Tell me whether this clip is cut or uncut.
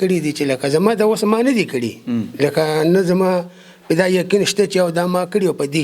uncut